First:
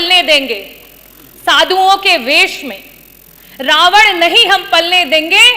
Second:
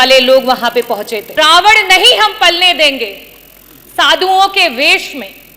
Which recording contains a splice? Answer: second; 1 cut; at 1.3 s

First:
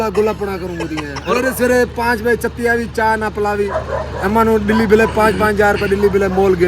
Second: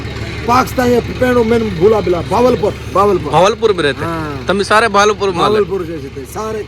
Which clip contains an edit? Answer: first; 1 cut; at 3.7 s

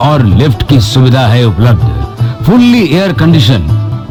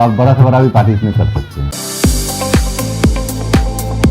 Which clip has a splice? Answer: second; 1 cut; at 1.7 s

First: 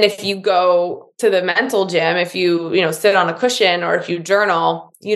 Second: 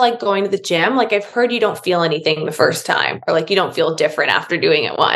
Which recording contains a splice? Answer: first; 1 cut; at 1.0 s

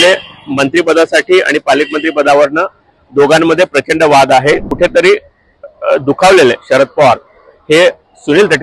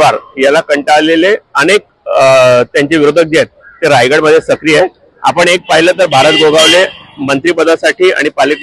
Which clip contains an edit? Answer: first; 1 cut; at 4.7 s

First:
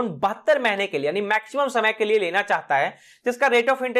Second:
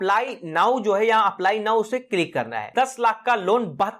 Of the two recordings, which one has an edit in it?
second; 1 cut; at 2.6 s

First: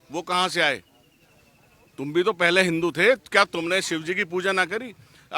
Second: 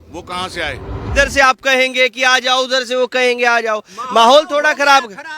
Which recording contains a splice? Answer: second; 1 cut; at 1.1 s

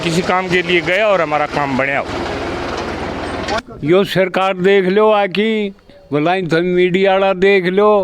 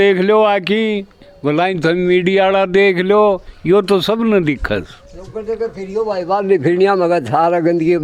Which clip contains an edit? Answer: first; 1 cut; at 3.6 s

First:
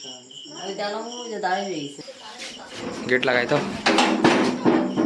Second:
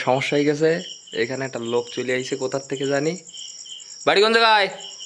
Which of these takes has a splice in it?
first; 1 cut; at 2.0 s

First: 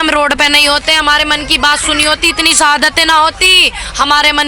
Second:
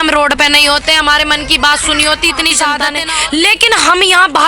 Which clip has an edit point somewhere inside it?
second; 1 cut; at 2.9 s

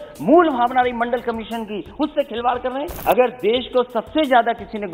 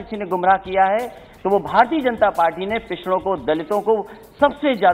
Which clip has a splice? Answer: first; 1 cut; at 2.9 s

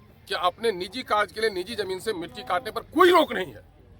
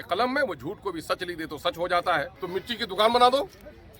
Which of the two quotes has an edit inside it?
second; 1 cut; at 2.4 s

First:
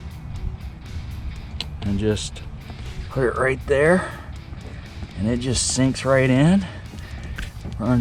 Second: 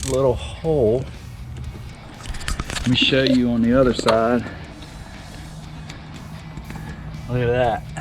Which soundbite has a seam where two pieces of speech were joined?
second; 1 cut; at 2.2 s

